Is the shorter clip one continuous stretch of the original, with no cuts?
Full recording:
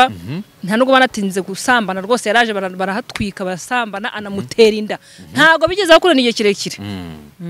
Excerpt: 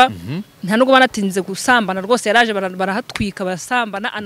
yes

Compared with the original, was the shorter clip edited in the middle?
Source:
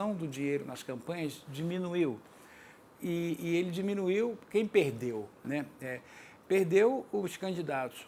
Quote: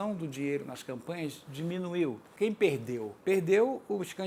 yes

